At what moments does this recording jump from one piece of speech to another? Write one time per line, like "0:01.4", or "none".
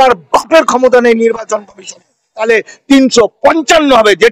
0:02.3